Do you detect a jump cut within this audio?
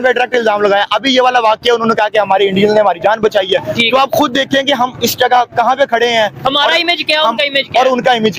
no; 0 cuts

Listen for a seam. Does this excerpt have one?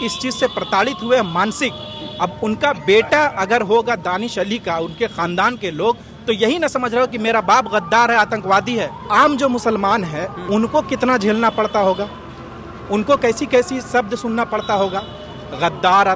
yes; 2 cuts; at 9.1 s, 10.3 s

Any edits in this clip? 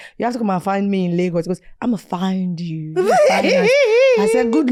no; 0 cuts

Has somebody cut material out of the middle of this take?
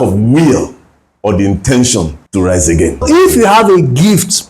yes; 2 cuts; at 2.2 s, 3.0 s

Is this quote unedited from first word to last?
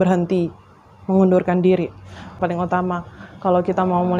no; 1 cut; at 2.3 s

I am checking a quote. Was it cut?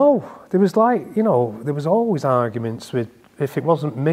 no; 0 cuts

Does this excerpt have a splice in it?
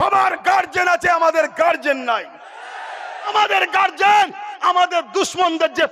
yes; 1 cut; at 3.3 s

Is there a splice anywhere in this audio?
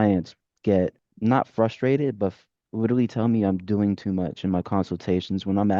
yes; 1 cut; at 1.0 s

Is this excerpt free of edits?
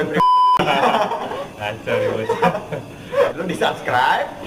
no; 1 cut; at 3.4 s

